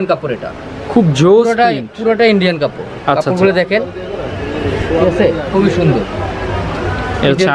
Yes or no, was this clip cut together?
no